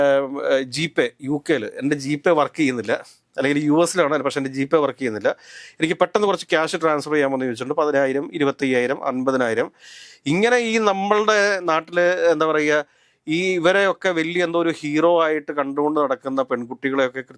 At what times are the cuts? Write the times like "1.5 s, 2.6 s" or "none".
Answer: none